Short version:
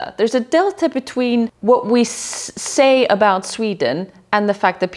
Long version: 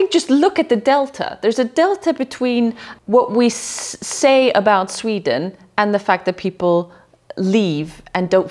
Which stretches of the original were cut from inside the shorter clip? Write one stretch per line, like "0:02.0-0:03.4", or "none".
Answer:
0:02.8-0:03.0